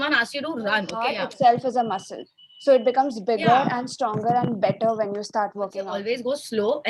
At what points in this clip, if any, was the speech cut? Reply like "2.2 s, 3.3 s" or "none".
1.0 s, 5.8 s